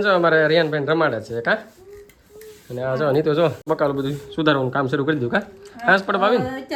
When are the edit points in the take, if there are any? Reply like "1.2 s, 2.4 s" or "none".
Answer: none